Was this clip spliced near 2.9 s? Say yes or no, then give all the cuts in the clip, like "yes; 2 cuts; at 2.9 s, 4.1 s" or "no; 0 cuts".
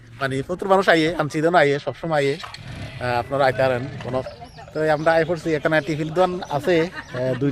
no; 1 cut; at 4.3 s